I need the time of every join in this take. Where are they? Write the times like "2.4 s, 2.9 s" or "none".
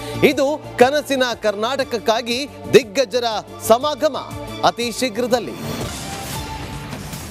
6.3 s